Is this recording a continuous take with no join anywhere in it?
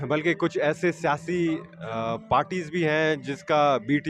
yes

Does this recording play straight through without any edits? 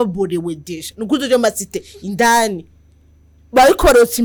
yes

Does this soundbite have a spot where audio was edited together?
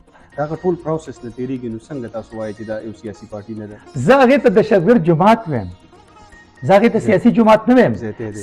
no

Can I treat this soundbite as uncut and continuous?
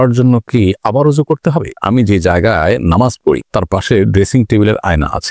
no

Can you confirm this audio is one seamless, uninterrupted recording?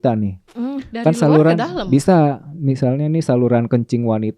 yes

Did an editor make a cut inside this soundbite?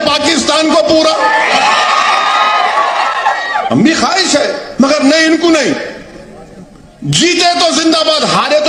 no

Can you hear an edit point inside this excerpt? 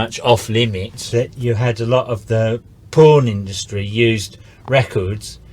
yes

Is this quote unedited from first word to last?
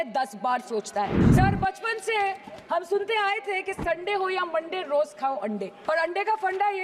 no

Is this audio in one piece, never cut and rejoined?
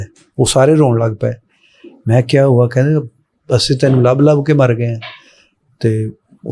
yes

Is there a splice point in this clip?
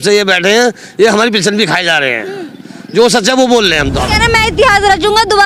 yes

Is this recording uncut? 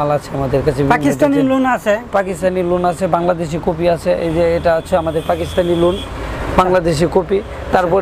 yes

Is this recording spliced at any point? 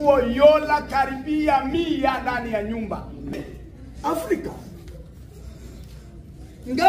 yes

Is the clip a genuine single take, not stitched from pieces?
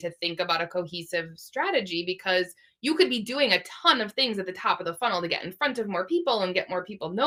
yes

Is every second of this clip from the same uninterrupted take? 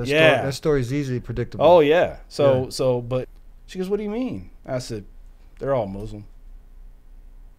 no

